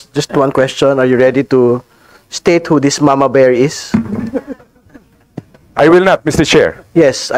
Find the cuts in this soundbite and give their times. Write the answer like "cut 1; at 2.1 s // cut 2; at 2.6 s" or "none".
none